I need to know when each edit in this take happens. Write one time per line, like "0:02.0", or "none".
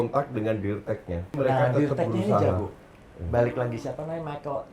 0:01.3